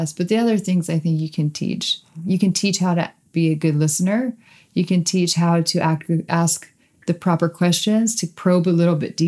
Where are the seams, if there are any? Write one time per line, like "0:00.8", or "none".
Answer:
0:02.2

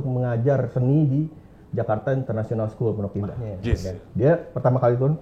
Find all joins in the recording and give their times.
0:03.9

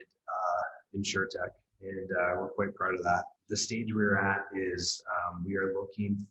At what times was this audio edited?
0:03.4

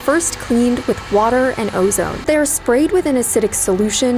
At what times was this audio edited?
0:02.3

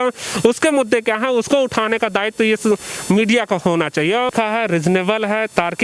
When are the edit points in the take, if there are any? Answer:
0:04.3

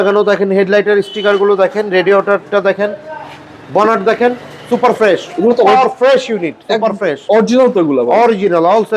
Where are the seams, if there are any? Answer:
none

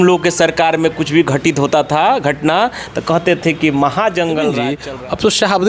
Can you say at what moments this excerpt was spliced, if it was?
0:04.7

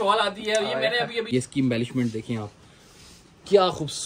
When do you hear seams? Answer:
0:01.3

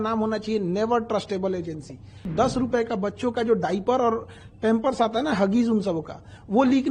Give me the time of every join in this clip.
0:02.3

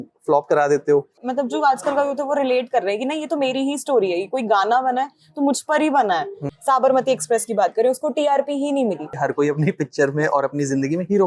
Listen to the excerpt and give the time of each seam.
0:01.1
0:06.4
0:09.1

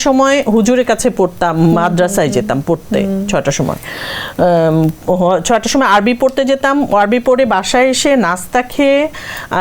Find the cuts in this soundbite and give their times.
none

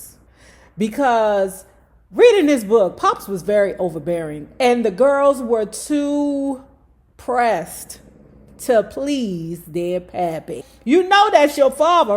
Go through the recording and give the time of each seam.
0:10.7

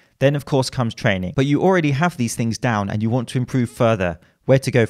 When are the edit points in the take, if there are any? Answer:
0:01.3

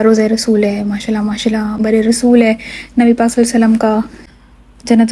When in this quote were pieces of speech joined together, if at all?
0:01.8
0:04.2

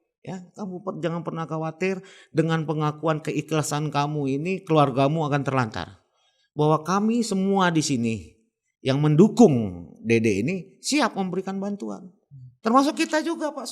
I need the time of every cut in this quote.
none

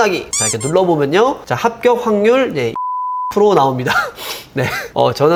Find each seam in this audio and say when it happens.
none

